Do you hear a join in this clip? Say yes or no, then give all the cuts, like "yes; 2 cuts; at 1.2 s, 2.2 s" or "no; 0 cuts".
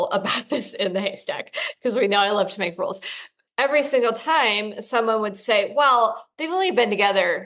yes; 1 cut; at 3.1 s